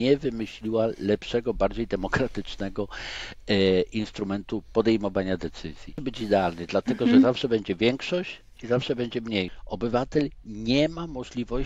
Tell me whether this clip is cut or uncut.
cut